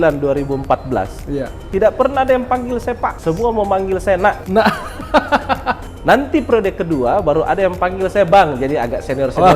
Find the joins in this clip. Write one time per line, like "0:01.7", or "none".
0:03.1
0:04.4
0:05.9